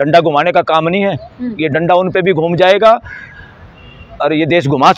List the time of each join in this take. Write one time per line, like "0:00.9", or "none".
none